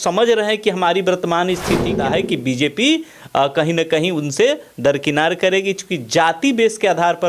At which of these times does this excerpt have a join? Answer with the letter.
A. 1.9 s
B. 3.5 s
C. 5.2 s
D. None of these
A